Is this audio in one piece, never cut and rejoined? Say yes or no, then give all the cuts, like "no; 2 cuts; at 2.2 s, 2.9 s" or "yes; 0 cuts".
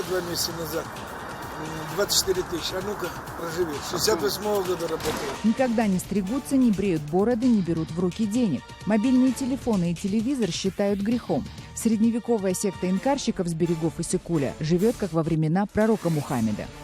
no; 1 cut; at 5.4 s